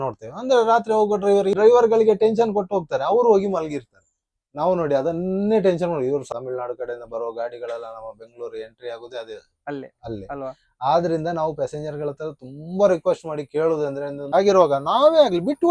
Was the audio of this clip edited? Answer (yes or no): yes